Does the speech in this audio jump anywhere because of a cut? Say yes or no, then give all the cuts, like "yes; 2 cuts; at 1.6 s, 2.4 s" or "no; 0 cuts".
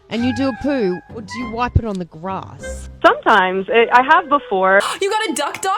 yes; 1 cut; at 4.8 s